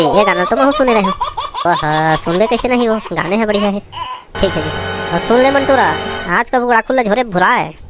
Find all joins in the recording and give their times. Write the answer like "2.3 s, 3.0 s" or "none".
4.3 s